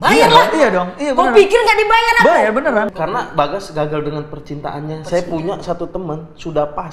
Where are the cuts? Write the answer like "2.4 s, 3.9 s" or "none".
2.9 s